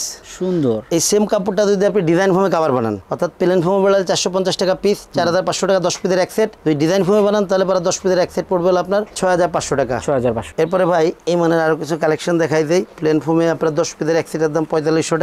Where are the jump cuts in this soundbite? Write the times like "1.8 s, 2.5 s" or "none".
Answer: none